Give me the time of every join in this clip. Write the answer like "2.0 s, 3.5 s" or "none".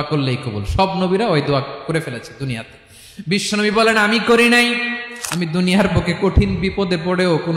5.0 s